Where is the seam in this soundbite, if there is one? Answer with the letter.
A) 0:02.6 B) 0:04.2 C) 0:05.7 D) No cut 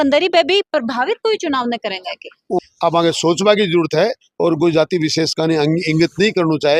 A